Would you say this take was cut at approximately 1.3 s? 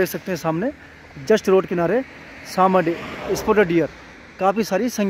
no; 0 cuts

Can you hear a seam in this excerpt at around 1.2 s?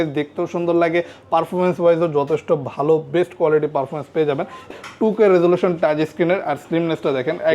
no; 1 cut; at 4.7 s

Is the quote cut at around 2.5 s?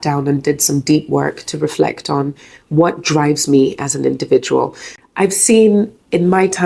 no; 1 cut; at 4.9 s

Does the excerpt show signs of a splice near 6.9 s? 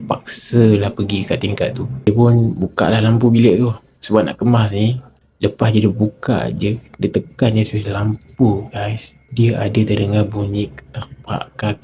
no; 1 cut; at 2.1 s

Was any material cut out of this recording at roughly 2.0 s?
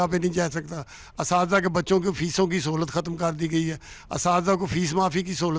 no; 0 cuts

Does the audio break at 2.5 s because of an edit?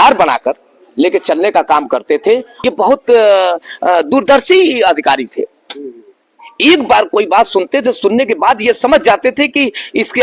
yes; 1 cut; at 2.5 s

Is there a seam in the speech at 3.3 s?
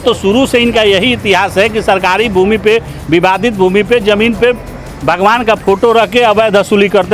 no; 0 cuts

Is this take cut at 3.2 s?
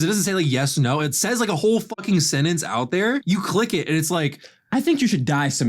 yes; 1 cut; at 3.2 s

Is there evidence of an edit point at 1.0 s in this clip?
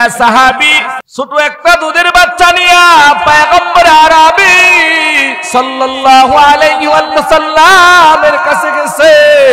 yes; 1 cut; at 1.0 s

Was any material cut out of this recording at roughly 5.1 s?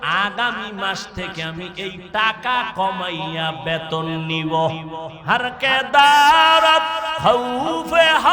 yes; 1 cut; at 5.1 s

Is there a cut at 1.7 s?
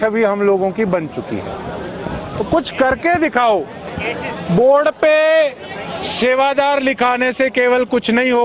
no; 0 cuts

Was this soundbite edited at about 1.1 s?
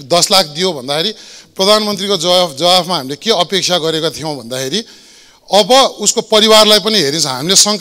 no; 0 cuts

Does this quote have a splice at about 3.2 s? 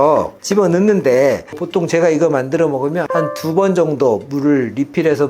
yes; 2 cuts; at 1.5 s, 3.2 s

